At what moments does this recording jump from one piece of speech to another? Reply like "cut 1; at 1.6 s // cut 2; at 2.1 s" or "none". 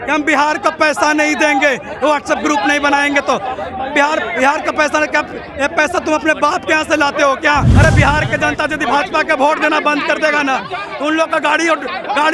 cut 1; at 7.7 s